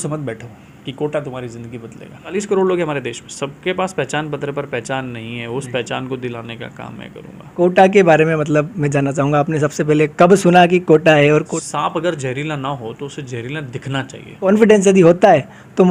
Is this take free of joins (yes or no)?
no